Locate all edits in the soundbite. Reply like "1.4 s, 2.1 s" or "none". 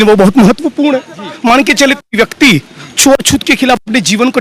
none